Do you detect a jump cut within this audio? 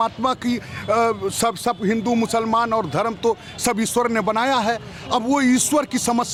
no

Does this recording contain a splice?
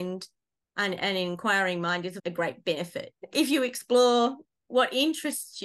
yes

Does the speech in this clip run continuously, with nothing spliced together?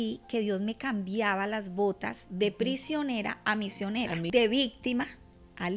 no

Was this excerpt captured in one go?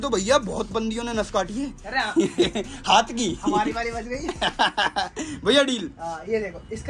yes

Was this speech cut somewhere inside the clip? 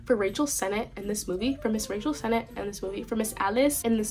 no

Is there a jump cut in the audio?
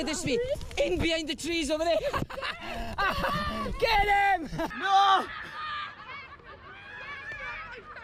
no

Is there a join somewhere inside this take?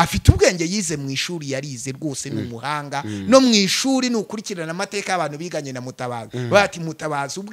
no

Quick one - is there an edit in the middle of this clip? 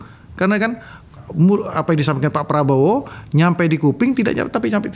yes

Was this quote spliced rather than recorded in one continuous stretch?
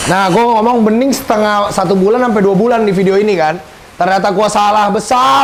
no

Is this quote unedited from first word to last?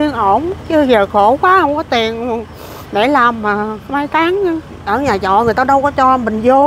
no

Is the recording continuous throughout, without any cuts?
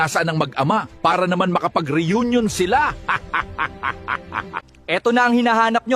no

